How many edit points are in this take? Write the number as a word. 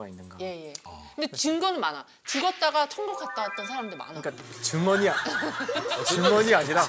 zero